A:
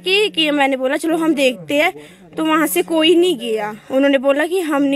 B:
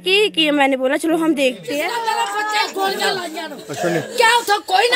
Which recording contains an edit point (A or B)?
B